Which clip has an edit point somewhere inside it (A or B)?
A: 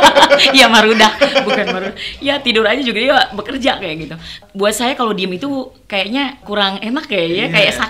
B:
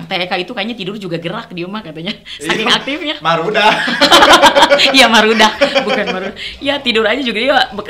A